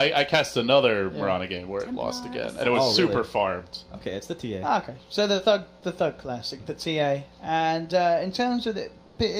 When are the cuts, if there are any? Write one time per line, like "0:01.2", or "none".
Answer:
0:04.8